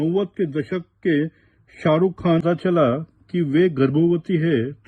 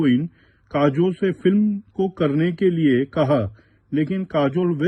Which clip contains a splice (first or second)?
first